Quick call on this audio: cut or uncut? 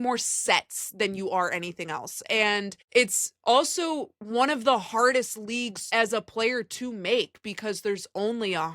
cut